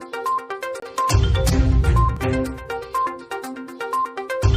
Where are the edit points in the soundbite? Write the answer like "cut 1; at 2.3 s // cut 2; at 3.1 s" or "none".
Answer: cut 1; at 3.5 s